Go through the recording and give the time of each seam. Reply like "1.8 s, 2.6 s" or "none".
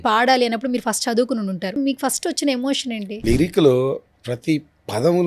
1.8 s, 3.2 s